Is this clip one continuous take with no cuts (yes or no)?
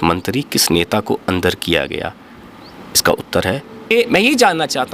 no